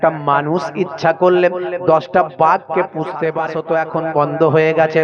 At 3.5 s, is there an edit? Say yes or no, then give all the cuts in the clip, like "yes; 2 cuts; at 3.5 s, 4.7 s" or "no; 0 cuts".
yes; 1 cut; at 3.5 s